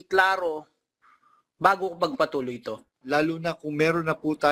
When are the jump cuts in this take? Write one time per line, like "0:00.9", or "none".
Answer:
0:02.9